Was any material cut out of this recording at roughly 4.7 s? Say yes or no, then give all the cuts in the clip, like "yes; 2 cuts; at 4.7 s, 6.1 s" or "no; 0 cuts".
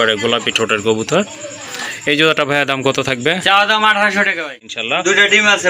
yes; 1 cut; at 4.7 s